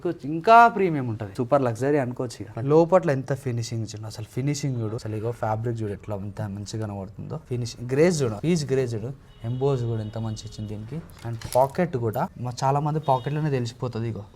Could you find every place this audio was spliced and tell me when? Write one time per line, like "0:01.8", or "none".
0:01.3
0:02.5
0:05.0
0:07.4
0:12.4